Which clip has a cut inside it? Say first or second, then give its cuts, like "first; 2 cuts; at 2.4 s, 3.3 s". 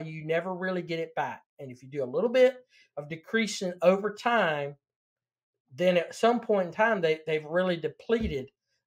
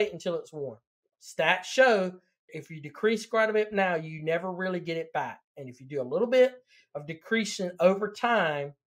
second; 1 cut; at 2.5 s